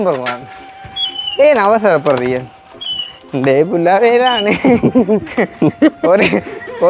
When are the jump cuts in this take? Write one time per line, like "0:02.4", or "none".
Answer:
none